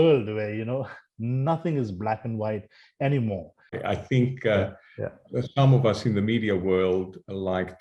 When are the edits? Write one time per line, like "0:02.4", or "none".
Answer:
0:03.8